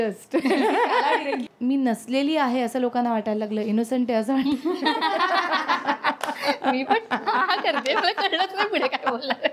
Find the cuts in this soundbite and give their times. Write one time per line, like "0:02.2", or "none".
0:01.5